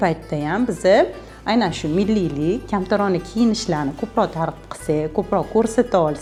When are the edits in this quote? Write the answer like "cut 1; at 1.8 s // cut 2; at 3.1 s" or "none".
none